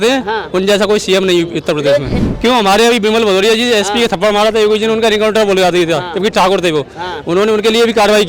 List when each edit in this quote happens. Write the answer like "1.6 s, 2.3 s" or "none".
2.2 s